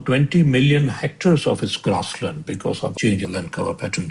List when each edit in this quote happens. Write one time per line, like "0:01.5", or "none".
0:02.9